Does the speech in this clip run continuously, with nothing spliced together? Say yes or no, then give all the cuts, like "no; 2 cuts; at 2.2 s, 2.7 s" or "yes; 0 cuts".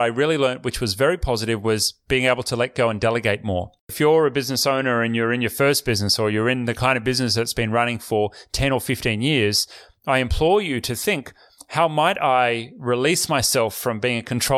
no; 1 cut; at 3.9 s